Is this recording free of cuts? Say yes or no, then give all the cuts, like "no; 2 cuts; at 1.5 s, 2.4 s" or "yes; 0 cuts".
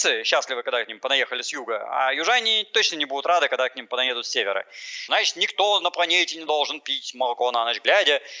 no; 1 cut; at 5.1 s